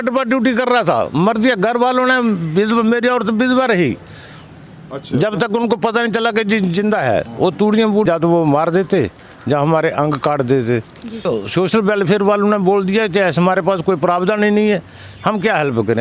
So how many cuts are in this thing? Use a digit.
2